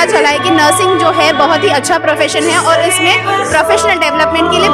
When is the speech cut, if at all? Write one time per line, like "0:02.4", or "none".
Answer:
none